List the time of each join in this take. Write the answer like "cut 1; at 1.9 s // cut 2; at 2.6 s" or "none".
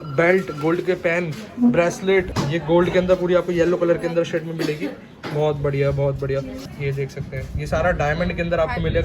cut 1; at 2.4 s // cut 2; at 6.6 s